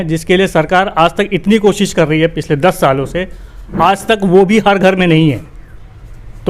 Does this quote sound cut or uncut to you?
uncut